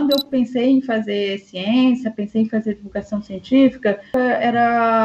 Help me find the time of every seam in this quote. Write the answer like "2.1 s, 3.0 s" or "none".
4.1 s